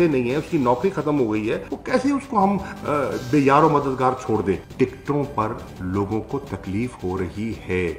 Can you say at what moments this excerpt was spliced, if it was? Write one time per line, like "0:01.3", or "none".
0:04.6